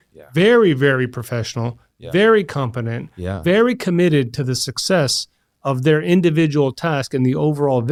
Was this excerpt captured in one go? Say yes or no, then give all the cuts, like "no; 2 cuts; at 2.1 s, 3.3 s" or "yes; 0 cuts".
yes; 0 cuts